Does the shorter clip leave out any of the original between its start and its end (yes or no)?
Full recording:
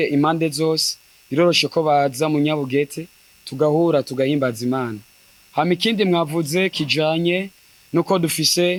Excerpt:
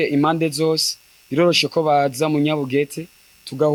no